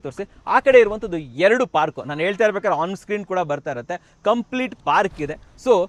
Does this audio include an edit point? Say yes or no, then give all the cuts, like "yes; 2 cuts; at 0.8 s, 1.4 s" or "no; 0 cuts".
no; 0 cuts